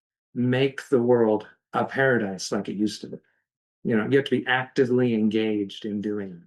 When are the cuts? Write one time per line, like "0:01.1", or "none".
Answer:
none

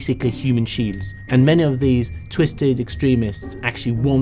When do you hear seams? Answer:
0:01.1

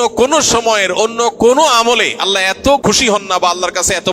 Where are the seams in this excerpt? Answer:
0:02.8

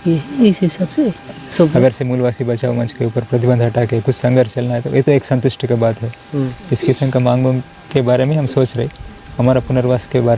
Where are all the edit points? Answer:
0:01.7

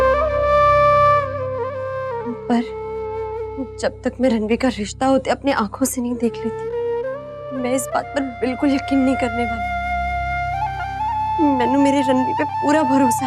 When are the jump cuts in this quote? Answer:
none

